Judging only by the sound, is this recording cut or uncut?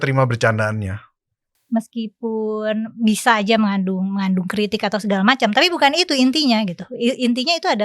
cut